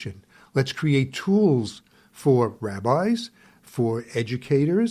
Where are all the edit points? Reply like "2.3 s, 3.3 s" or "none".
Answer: none